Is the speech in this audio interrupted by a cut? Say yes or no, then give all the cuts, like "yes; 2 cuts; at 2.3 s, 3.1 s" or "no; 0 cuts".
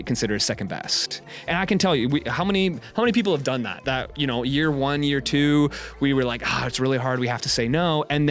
yes; 1 cut; at 1.4 s